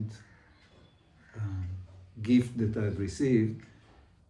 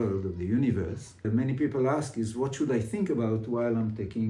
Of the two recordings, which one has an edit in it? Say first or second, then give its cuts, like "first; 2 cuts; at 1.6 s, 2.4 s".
second; 1 cut; at 1.3 s